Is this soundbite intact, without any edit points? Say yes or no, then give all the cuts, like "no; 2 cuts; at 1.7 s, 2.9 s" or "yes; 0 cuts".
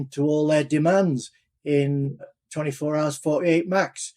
no; 1 cut; at 2.4 s